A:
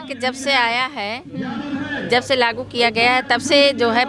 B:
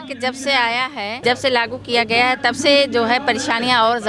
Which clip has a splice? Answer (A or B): B